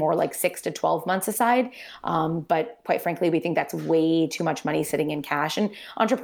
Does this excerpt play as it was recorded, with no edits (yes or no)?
yes